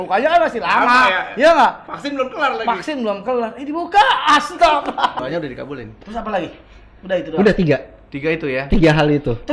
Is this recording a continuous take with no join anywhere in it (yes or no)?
no